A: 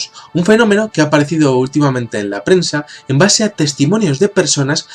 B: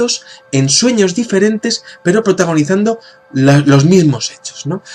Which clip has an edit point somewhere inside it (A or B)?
A